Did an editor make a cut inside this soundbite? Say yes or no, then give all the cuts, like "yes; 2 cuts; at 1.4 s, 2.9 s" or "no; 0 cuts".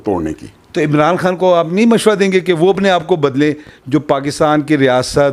no; 0 cuts